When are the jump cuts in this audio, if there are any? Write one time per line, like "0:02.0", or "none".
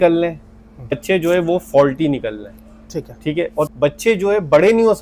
0:00.9
0:03.7

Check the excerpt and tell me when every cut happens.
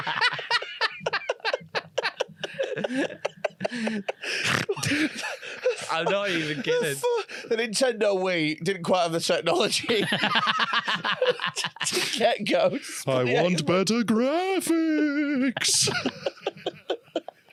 none

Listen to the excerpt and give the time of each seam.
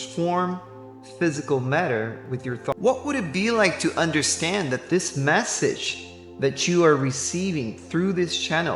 0:02.7

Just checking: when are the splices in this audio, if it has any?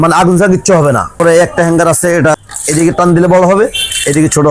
0:01.1
0:02.3

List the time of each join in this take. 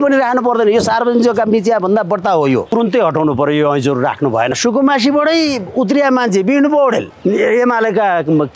0:02.7
0:04.6
0:07.1

